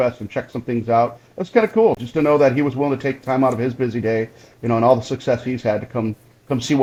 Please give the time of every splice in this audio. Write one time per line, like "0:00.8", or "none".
none